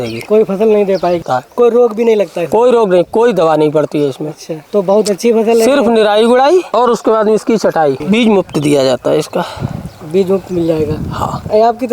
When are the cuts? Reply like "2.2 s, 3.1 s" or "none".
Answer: 1.2 s, 8.0 s